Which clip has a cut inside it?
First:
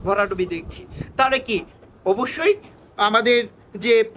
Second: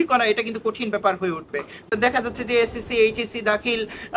second; 1 cut; at 1.8 s

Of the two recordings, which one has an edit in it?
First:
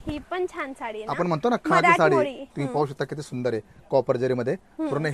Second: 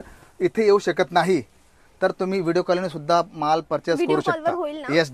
first; 1 cut; at 2.4 s

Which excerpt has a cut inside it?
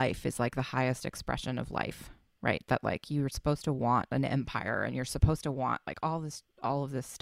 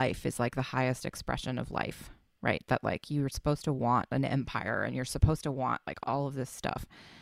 second; 1 cut; at 5.9 s

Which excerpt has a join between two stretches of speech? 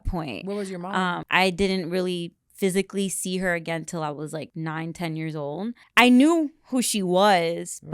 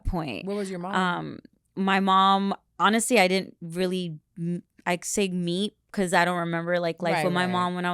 first; 3 cuts; at 1.2 s, 4.5 s, 5.8 s

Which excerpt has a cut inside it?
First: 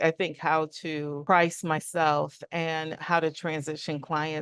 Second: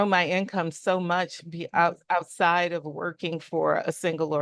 first; 2 cuts; at 1.1 s, 3.0 s

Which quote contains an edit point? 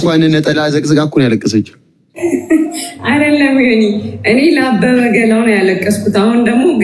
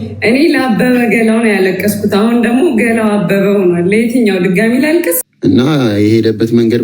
second; 1 cut; at 5.3 s

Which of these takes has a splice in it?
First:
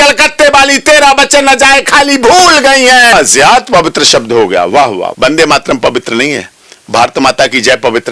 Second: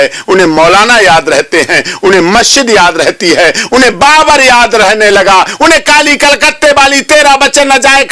first; 2 cuts; at 3.1 s, 5.1 s

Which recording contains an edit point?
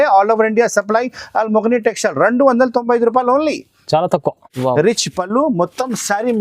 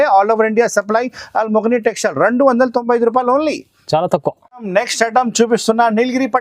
first; 1 cut; at 4.5 s

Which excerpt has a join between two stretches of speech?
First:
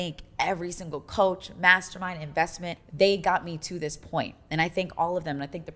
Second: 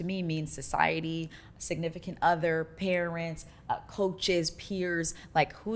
first; 1 cut; at 2.8 s

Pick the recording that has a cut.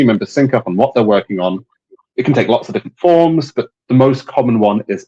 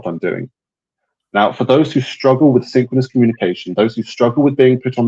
first; 1 cut; at 2.0 s

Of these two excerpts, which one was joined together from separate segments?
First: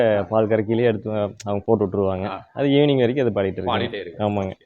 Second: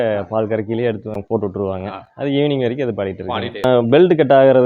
second; 2 cuts; at 1.1 s, 3.9 s

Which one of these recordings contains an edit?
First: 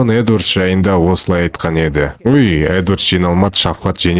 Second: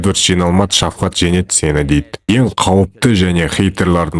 second; 1 cut; at 2.3 s

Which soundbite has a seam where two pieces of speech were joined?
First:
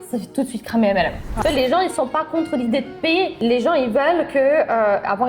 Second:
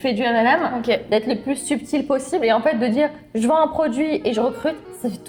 first; 1 cut; at 1.4 s

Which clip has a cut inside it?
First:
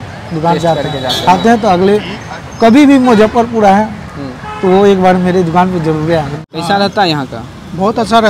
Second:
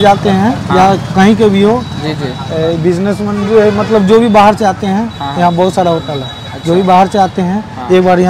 first; 1 cut; at 6.4 s

